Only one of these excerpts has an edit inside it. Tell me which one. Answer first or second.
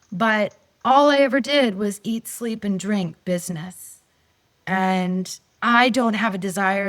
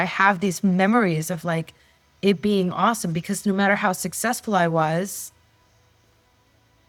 first